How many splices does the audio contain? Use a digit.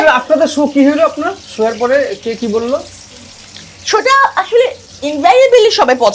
0